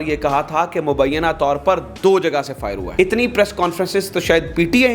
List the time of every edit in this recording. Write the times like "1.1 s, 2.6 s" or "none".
2.8 s